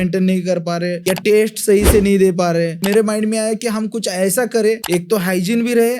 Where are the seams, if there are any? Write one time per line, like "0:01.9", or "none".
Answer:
0:01.0
0:02.8
0:04.8